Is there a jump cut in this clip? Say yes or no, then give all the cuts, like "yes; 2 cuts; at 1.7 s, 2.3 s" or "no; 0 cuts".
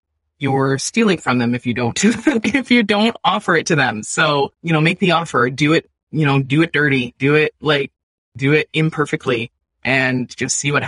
no; 0 cuts